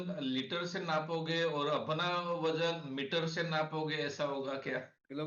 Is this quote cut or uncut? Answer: uncut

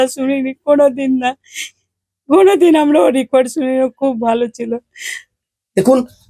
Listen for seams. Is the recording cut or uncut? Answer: uncut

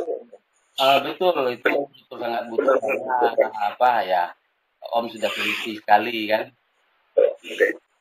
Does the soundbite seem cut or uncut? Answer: uncut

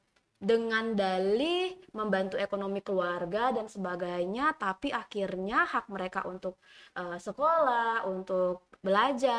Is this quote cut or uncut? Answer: uncut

